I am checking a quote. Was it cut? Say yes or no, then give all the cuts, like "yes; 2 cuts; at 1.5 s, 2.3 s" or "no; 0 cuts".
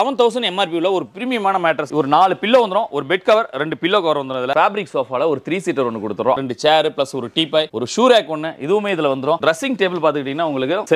yes; 4 cuts; at 1.9 s, 4.5 s, 6.4 s, 9.4 s